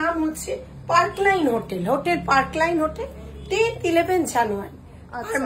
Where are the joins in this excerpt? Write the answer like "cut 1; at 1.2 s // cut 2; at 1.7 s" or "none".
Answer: none

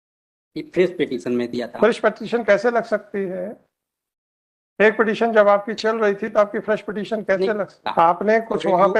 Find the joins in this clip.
cut 1; at 7.8 s

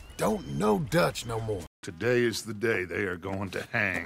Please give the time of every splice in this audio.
cut 1; at 1.7 s

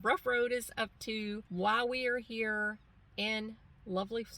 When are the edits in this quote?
cut 1; at 1.4 s

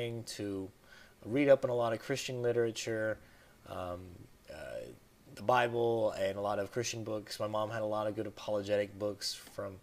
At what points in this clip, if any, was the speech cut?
cut 1; at 5.7 s

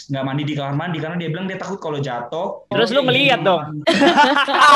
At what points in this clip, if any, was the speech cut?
cut 1; at 2.7 s

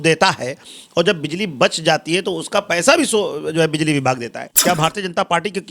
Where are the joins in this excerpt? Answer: cut 1; at 4.5 s

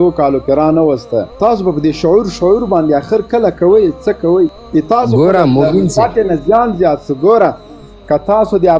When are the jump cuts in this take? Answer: cut 1; at 1.3 s // cut 2; at 4.6 s

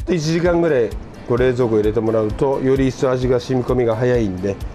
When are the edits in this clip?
none

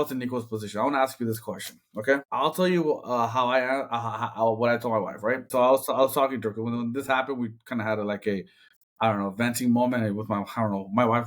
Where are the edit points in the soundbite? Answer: cut 1; at 2.3 s // cut 2; at 5.4 s

